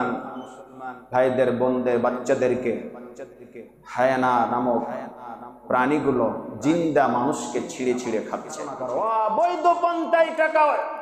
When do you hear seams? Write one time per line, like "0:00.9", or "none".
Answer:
0:08.8